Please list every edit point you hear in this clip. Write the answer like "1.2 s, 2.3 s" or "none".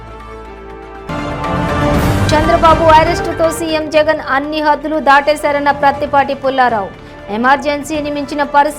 1.0 s